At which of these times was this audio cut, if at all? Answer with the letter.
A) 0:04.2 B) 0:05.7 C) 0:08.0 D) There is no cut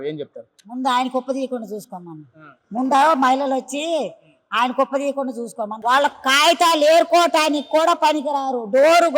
B